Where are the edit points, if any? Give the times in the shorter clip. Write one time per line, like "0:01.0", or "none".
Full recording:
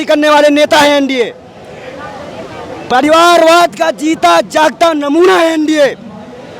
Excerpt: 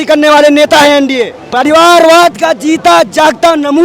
0:01.4